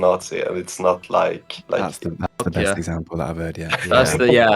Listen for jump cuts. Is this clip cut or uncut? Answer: cut